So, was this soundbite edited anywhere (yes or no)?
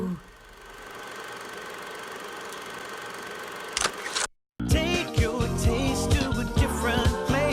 yes